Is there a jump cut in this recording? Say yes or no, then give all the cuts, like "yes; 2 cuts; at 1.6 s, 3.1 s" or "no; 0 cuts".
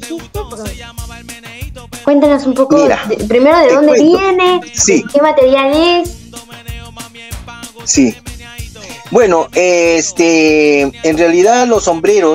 no; 0 cuts